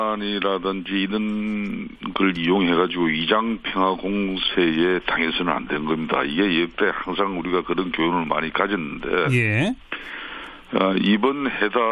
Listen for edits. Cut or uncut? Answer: cut